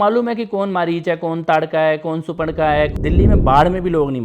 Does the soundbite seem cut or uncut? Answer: cut